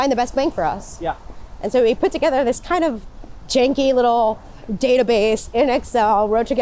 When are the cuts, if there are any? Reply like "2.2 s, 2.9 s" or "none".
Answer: none